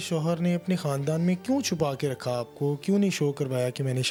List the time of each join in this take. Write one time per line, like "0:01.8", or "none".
none

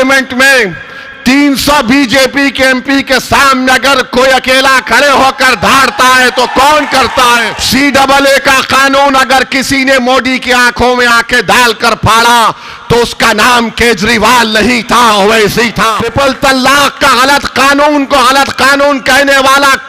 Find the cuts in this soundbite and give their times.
0:07.5
0:16.0

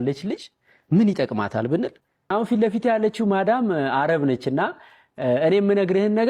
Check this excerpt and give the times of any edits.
0:02.3

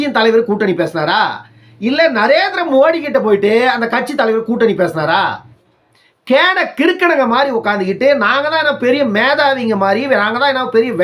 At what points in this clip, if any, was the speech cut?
none

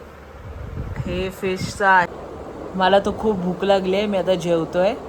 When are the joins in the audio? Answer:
0:02.1

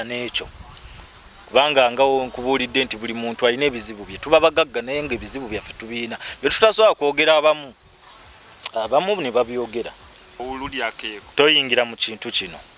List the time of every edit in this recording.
0:10.4

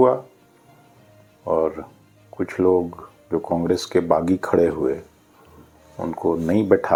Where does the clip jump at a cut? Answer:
none

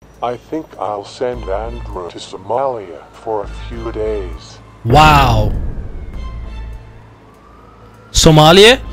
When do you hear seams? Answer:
none

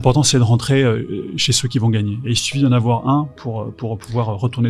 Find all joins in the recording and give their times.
none

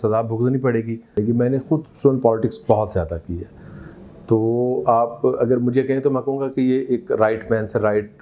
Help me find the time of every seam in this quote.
0:01.2

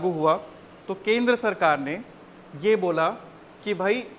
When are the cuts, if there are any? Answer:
none

